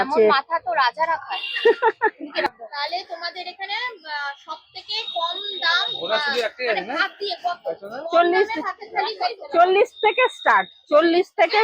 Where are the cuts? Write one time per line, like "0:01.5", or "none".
0:02.5

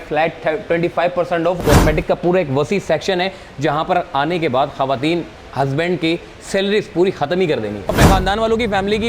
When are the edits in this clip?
0:01.6
0:07.8

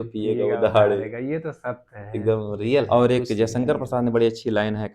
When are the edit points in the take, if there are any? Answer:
0:02.9

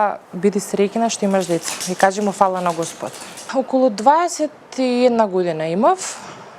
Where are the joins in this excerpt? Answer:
0:03.4

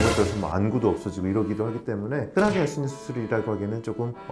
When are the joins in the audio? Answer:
0:02.3

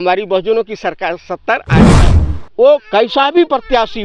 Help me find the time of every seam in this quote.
0:01.9

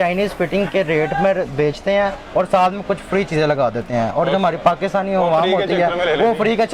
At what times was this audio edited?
none

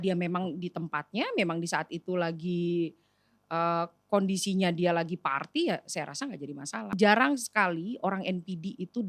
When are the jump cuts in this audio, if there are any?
0:07.0

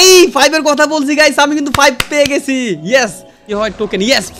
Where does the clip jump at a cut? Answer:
0:03.4

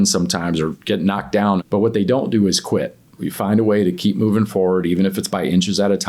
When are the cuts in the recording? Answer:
0:01.6
0:03.2

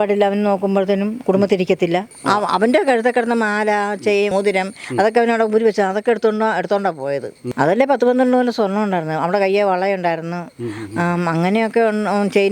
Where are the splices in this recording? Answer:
0:02.1

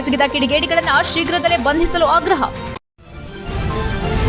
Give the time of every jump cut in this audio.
0:02.7

